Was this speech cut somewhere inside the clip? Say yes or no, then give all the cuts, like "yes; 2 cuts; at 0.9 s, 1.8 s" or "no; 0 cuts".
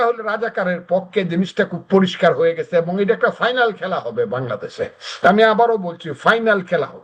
no; 0 cuts